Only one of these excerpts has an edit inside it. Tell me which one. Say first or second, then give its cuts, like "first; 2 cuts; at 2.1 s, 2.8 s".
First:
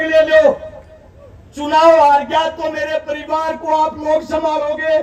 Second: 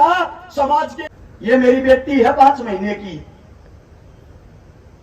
second; 1 cut; at 1.0 s